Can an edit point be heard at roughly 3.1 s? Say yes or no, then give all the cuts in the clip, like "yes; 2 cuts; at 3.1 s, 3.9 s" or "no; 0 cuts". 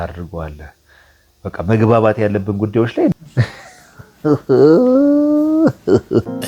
yes; 1 cut; at 3.1 s